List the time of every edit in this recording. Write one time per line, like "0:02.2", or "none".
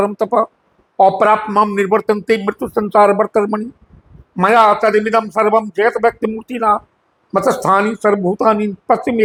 none

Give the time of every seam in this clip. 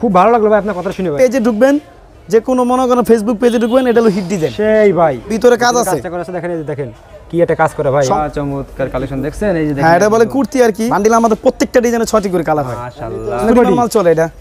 0:01.1
0:05.3
0:08.1
0:10.9
0:13.4

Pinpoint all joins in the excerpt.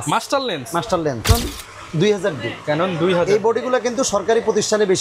0:01.3

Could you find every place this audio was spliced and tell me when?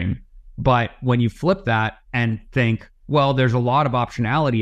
0:02.0
0:02.9

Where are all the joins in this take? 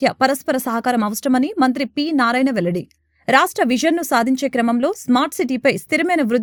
none

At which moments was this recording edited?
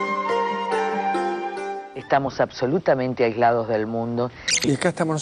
0:01.9

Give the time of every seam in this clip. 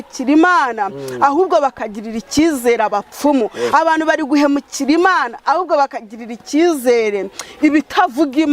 none

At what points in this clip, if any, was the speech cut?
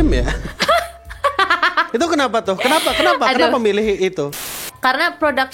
0:04.4

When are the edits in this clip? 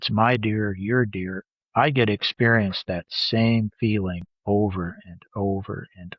0:04.3

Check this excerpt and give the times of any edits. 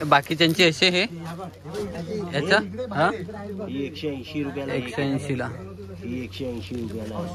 none

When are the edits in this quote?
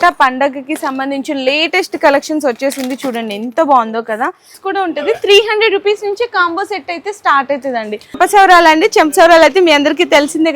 0:04.5
0:08.2

